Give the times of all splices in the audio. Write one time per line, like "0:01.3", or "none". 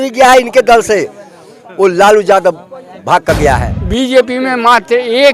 0:03.7